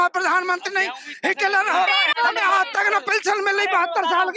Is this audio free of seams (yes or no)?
no